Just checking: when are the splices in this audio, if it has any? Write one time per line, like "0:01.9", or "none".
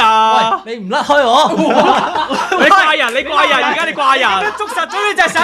none